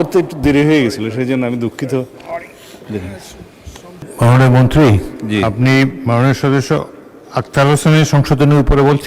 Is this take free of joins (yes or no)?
no